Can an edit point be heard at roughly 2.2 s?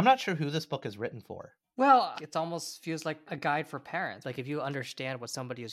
yes; 3 cuts; at 2.2 s, 3.2 s, 4.2 s

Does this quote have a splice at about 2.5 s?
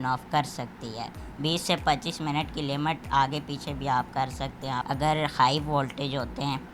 no; 2 cuts; at 1.2 s, 4.8 s

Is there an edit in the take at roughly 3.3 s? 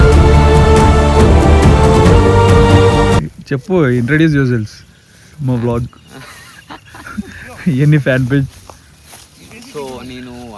yes; 1 cut; at 3.3 s

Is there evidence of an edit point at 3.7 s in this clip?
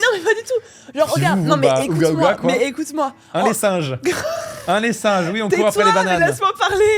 no; 0 cuts

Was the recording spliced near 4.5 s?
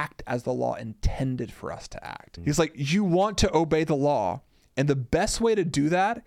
no; 1 cut; at 2.2 s

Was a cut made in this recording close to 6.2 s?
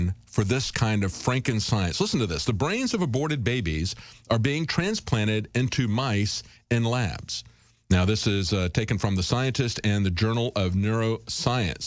no; 0 cuts

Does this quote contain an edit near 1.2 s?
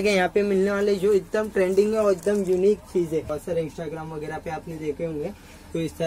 no; 1 cut; at 3.3 s

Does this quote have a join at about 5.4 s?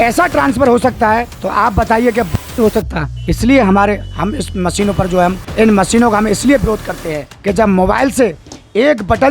yes; 1 cut; at 5.4 s

